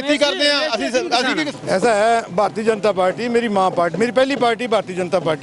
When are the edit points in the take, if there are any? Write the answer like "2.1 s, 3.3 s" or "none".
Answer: 1.5 s